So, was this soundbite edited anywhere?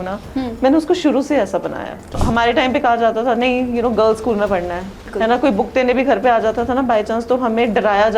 yes; 2 cuts; at 2.1 s, 5.0 s

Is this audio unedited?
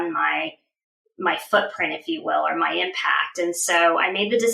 yes; 0 cuts

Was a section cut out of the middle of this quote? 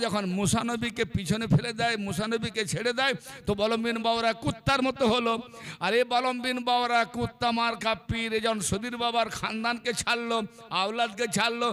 no; 0 cuts

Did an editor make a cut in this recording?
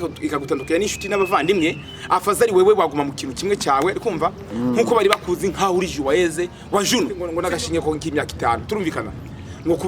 yes; 1 cut; at 7.3 s

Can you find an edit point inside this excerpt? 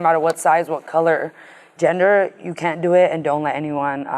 no; 0 cuts

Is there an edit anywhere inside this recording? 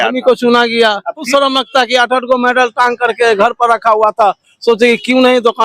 yes; 1 cut; at 1.3 s

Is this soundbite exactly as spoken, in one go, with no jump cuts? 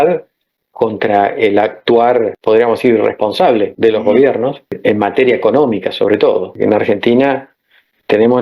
no; 4 cuts; at 2.4 s, 3.7 s, 4.8 s, 6.6 s

